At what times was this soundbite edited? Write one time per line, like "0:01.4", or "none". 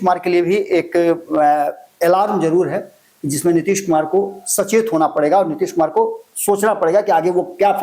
none